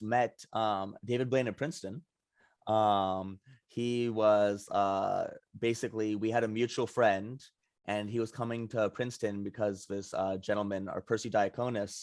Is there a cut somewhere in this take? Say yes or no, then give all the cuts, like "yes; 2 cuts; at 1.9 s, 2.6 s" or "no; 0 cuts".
no; 0 cuts